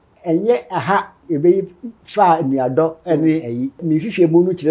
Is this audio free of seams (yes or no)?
no